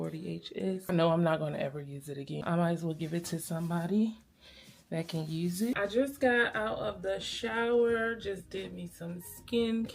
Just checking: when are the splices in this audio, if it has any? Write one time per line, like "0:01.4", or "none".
0:00.9
0:02.4
0:05.8